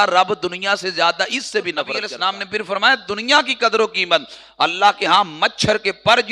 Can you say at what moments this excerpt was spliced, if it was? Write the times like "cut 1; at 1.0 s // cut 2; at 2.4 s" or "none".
cut 1; at 2.0 s